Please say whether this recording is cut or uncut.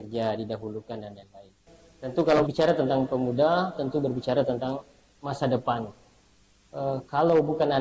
cut